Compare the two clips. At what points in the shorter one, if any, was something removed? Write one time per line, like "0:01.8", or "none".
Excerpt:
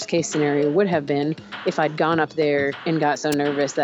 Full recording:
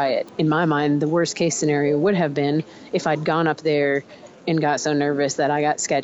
0:02.8